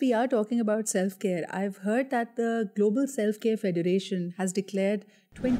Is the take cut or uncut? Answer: uncut